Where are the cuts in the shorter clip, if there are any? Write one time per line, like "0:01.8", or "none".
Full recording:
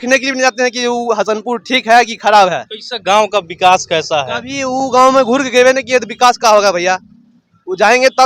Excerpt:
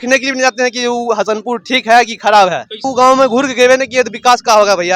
0:02.8

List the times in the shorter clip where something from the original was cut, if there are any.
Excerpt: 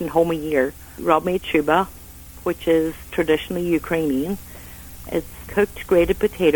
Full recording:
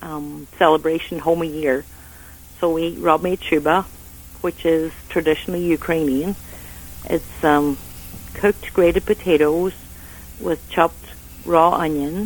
0:01.0
0:05.3

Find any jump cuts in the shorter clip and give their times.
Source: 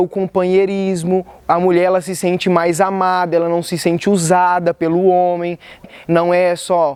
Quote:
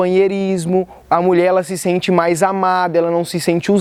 none

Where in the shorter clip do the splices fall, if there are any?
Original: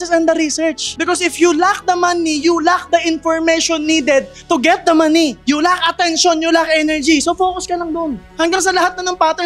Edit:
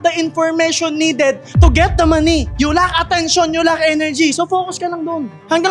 none

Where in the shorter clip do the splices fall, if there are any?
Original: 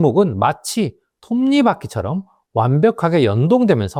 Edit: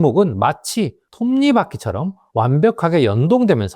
0:01.0
0:02.2

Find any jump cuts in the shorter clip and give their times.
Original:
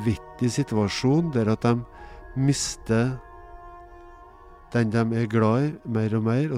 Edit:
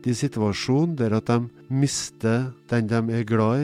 0:01.6
0:02.6

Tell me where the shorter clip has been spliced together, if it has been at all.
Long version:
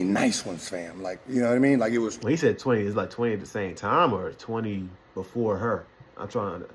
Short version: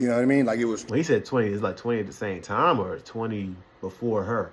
none

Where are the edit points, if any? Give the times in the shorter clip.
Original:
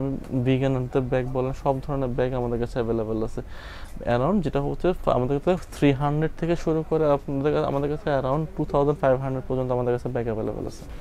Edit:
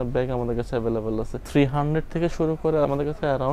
0:01.4
0:02.8

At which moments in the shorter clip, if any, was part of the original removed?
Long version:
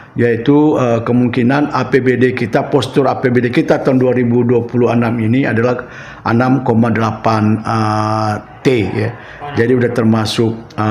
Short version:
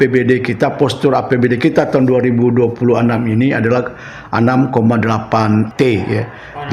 0:05.7

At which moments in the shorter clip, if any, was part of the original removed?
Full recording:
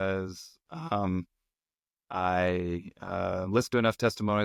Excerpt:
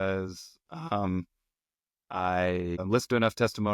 0:02.8

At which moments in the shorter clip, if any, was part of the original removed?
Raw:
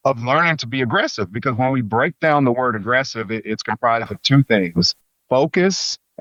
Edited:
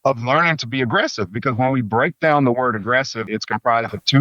0:03.2

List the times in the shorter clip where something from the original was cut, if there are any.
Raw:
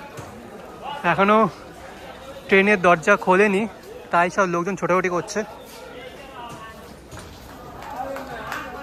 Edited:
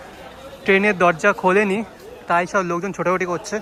none

